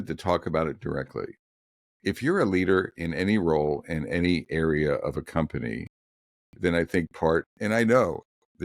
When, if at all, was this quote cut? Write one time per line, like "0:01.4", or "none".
0:07.5